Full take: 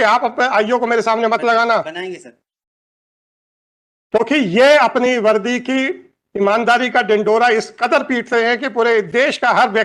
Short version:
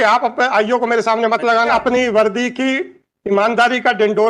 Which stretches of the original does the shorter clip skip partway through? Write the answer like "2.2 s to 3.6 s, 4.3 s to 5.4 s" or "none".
1.7 s to 4.8 s